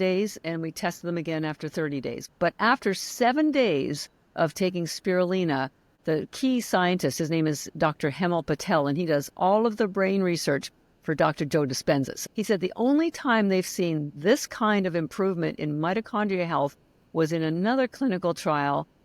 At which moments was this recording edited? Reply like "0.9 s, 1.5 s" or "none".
2.2 s, 5.8 s, 12.1 s

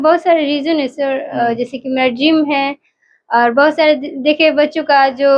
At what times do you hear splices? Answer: none

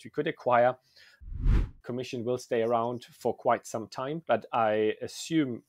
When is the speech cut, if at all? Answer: 1.5 s, 4.2 s

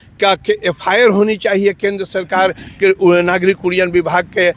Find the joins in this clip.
none

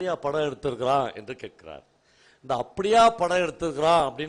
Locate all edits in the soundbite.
none

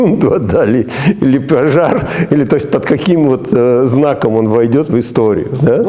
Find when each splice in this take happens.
none

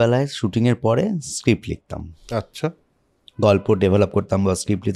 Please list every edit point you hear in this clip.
none

